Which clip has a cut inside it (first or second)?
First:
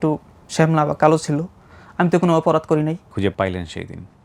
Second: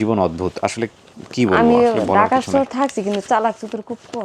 first